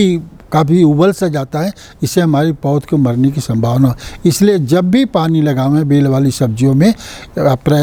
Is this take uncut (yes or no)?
yes